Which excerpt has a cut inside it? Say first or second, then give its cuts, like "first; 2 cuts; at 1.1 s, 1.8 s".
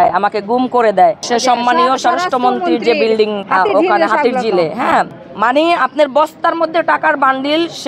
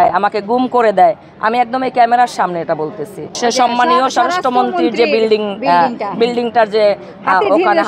first; 3 cuts; at 1.2 s, 3.4 s, 5.2 s